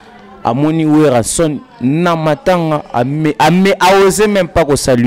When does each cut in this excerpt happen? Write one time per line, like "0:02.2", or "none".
none